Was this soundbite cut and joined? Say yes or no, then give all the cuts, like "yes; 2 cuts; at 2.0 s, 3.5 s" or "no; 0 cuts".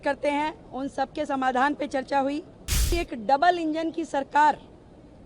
yes; 1 cut; at 2.9 s